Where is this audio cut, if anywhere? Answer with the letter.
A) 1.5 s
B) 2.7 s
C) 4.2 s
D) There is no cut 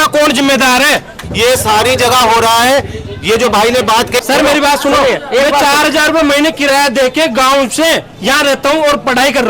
C